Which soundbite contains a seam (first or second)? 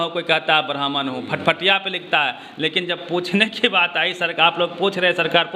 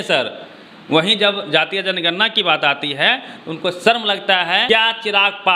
second